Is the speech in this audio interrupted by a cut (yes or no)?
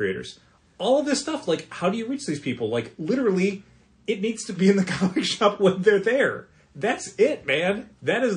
no